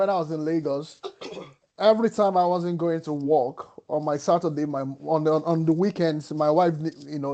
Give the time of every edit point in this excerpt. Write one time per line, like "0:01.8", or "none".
none